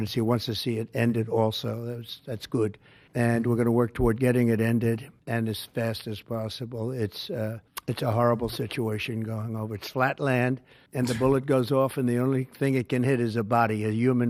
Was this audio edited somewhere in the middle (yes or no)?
no